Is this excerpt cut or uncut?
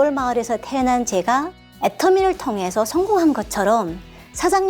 cut